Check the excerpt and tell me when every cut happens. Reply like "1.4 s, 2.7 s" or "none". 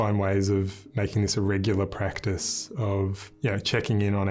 3.2 s